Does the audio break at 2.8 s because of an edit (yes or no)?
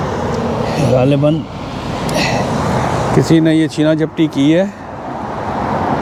no